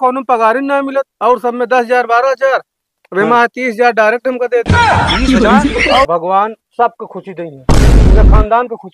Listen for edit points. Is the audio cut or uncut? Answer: cut